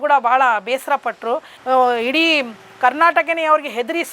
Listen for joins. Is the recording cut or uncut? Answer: cut